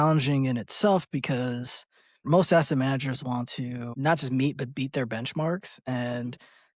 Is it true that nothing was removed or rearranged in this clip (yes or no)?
no